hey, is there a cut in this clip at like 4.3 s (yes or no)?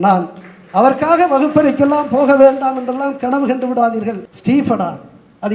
yes